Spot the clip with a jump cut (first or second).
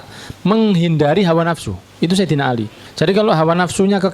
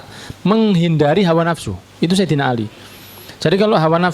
first